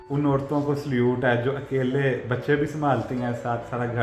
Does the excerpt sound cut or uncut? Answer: uncut